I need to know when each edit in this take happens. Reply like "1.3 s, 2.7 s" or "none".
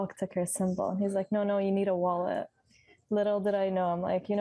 none